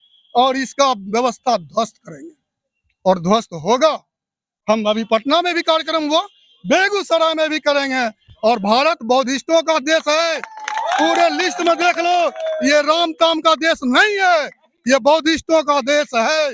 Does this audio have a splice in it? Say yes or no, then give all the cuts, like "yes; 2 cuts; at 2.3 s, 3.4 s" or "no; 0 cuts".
no; 0 cuts